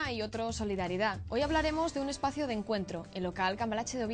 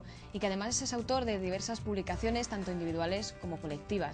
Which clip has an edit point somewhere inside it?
second; 1 cut; at 0.9 s

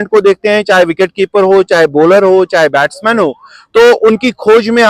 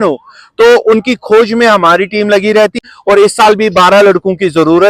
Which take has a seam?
second; 1 cut; at 2.8 s

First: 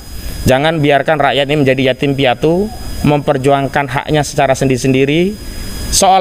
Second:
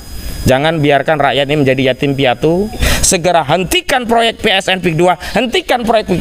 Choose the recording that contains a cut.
second; 1 cut; at 2.8 s

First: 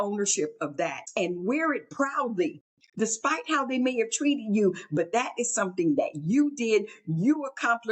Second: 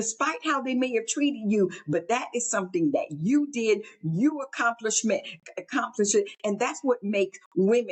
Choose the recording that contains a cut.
first; 1 cut; at 1.0 s

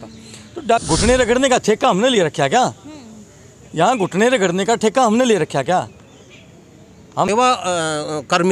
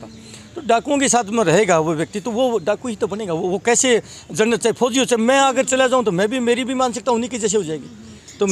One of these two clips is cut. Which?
first; 2 cuts; at 0.8 s, 7.3 s

